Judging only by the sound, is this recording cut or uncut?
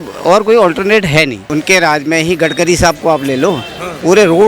cut